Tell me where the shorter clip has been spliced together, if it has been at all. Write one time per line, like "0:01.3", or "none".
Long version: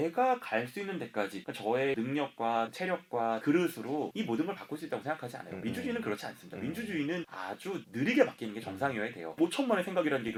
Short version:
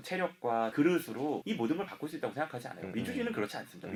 none